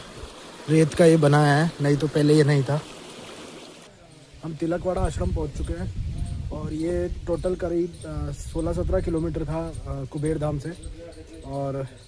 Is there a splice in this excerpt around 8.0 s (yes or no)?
no